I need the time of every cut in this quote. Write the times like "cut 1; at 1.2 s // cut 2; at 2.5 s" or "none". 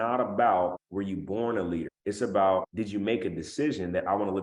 cut 1; at 0.8 s // cut 2; at 1.9 s // cut 3; at 2.7 s